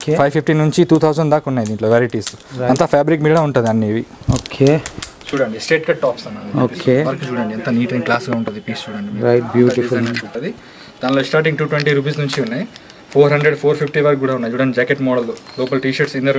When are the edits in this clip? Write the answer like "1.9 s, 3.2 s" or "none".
5.1 s, 10.3 s